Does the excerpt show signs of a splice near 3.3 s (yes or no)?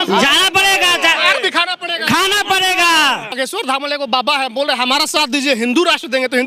yes